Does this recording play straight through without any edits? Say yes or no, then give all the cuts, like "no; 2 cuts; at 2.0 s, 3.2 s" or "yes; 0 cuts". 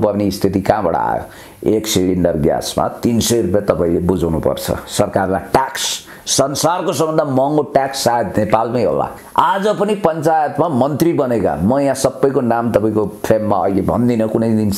no; 1 cut; at 9.2 s